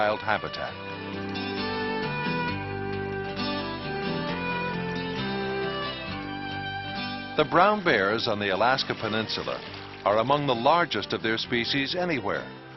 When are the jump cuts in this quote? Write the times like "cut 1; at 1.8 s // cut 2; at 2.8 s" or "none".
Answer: cut 1; at 9.4 s